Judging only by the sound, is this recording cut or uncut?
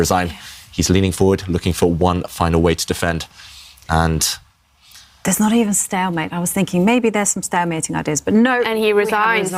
uncut